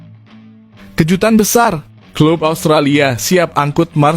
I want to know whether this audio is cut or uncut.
cut